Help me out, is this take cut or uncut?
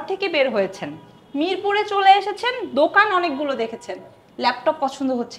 uncut